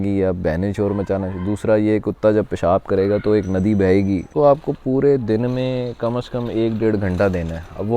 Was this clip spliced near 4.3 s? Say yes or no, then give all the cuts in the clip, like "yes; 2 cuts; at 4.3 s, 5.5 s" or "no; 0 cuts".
yes; 1 cut; at 4.3 s